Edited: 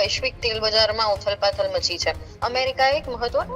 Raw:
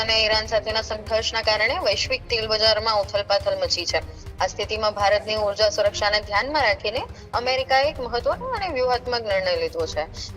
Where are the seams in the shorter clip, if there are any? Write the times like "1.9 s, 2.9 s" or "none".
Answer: 2.3 s